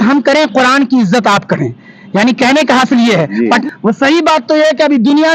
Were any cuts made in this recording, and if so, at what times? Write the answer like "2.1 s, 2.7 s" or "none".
3.6 s